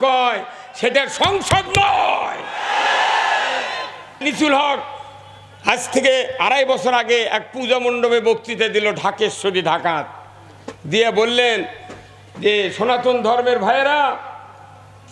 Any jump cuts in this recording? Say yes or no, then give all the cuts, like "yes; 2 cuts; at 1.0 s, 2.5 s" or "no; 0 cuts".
yes; 1 cut; at 4.2 s